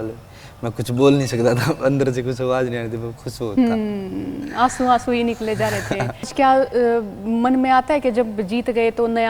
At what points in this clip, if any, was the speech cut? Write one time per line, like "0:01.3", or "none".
0:06.3

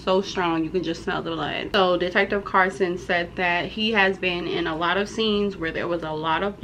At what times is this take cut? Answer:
0:01.6

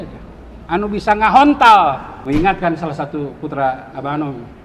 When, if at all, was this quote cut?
0:02.1

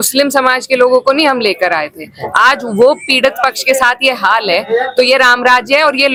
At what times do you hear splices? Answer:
none

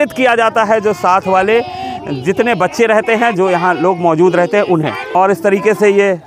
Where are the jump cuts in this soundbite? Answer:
0:05.0

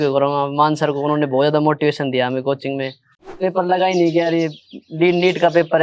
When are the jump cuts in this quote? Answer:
0:03.4

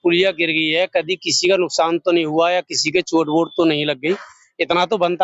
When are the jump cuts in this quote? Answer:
none

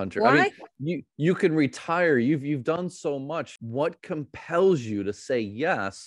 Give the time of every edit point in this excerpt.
0:03.6

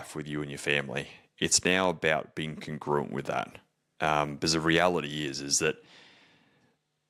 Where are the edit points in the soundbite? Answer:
none

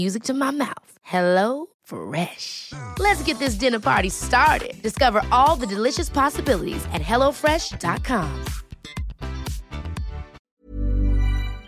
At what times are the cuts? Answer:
0:10.4

